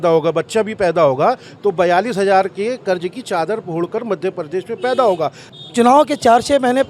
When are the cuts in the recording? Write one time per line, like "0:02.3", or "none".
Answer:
0:05.4